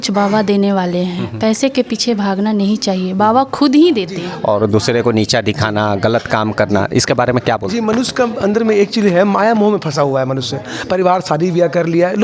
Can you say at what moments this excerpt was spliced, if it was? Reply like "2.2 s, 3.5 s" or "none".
4.4 s